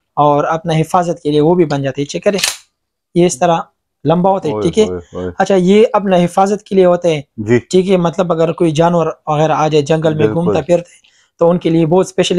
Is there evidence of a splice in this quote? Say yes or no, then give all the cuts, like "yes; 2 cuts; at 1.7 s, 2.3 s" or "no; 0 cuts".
no; 0 cuts